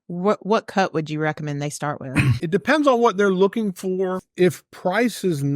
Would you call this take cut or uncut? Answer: cut